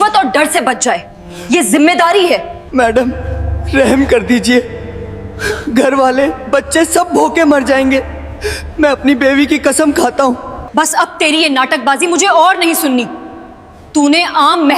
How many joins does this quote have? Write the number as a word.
two